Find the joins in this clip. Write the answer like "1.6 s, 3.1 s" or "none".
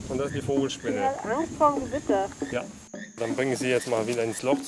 3.2 s